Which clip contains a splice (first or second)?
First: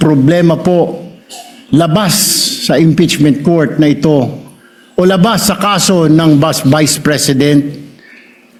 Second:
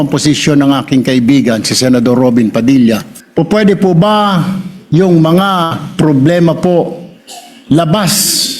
second